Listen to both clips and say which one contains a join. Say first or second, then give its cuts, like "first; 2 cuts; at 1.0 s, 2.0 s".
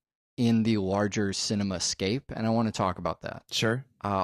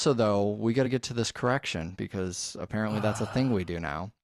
first; 1 cut; at 3.1 s